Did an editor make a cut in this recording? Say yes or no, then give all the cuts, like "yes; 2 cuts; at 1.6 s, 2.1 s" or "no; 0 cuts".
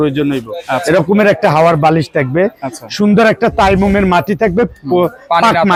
no; 0 cuts